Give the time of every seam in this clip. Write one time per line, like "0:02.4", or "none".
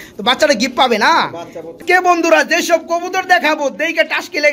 0:01.7